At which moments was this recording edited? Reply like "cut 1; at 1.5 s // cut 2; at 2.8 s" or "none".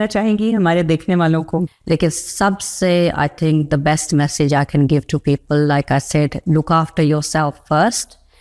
cut 1; at 1.7 s